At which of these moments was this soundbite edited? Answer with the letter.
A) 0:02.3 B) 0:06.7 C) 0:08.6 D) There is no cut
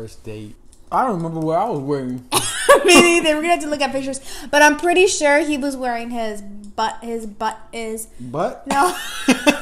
D